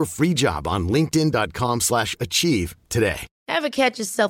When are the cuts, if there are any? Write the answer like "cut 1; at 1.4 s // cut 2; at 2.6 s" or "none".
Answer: cut 1; at 3.3 s